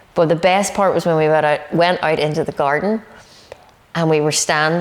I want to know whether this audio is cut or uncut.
uncut